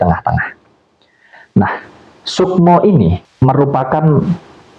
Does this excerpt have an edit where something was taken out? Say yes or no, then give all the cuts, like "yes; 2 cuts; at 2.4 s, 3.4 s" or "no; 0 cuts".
yes; 1 cut; at 3.3 s